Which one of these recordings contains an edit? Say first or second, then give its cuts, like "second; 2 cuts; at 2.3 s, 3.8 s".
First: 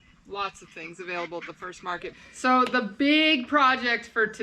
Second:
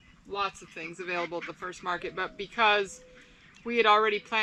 first; 1 cut; at 2.1 s